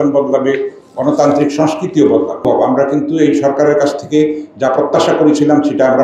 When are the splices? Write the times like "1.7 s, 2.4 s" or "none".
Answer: 2.4 s